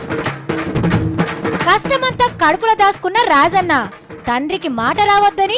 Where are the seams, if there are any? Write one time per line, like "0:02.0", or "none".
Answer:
0:01.0